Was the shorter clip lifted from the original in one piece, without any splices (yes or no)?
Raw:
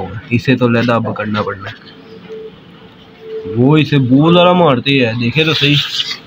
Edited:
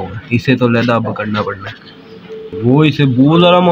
no